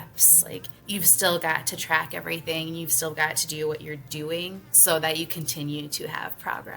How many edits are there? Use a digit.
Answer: 2